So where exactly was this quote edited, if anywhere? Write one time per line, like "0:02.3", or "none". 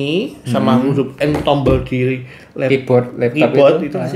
none